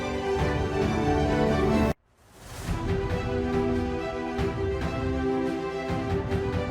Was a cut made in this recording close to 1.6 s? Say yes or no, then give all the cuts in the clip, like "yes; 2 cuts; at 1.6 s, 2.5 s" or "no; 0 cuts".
yes; 1 cut; at 1.6 s